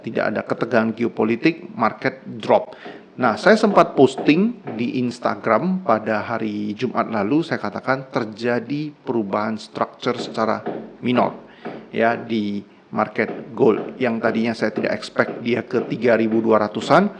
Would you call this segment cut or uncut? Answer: uncut